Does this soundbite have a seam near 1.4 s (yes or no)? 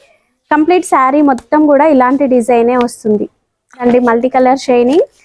no